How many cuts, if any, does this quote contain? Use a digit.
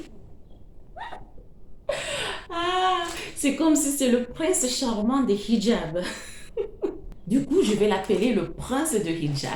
1